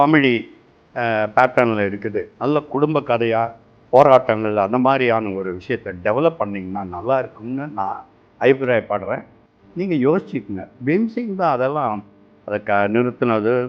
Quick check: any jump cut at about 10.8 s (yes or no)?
yes